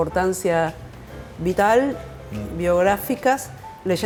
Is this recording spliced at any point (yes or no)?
no